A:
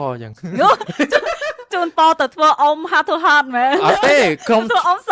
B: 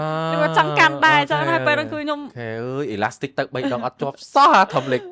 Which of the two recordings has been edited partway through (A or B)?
B